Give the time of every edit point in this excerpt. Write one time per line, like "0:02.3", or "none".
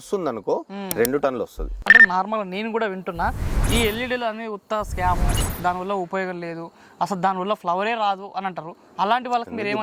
0:01.9